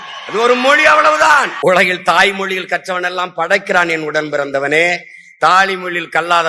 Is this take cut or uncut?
cut